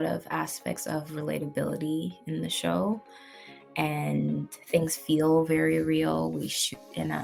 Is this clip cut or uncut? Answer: uncut